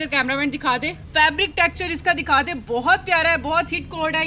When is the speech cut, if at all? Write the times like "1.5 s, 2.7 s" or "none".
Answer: 1.0 s